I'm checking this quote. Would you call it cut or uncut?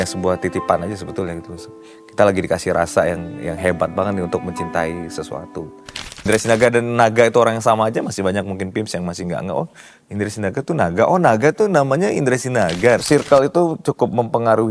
cut